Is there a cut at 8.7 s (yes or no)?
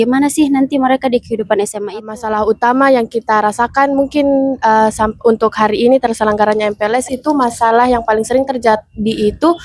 no